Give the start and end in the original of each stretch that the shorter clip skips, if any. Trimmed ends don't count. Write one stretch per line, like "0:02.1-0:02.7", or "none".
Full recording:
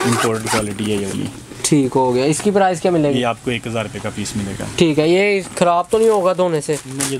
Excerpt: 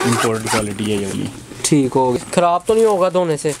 0:02.2-0:05.4